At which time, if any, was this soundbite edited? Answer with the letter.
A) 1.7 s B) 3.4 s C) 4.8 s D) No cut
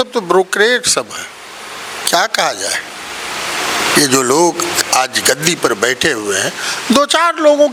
D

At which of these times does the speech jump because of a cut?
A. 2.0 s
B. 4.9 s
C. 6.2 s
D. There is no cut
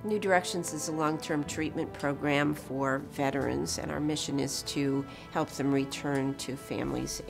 D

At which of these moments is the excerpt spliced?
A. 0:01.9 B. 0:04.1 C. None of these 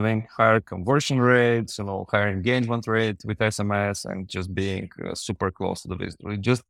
C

